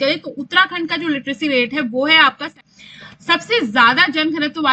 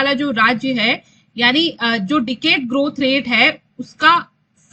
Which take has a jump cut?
first; 1 cut; at 2.5 s

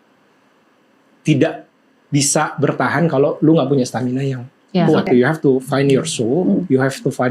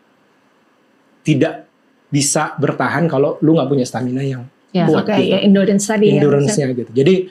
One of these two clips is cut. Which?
first; 1 cut; at 5.1 s

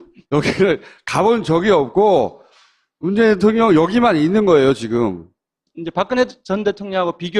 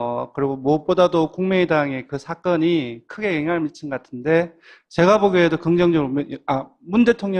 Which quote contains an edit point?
first; 1 cut; at 2.1 s

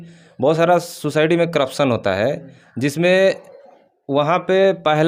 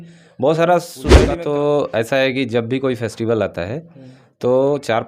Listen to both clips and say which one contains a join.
second; 1 cut; at 1.2 s

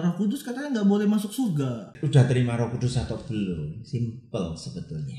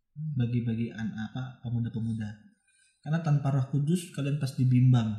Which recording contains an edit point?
first; 1 cut; at 2.0 s

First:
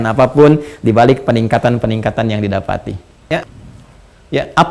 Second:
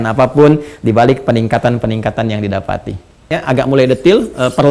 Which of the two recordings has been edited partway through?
first; 1 cut; at 3.4 s

